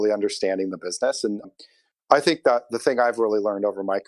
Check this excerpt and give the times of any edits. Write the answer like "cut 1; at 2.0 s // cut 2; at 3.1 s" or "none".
none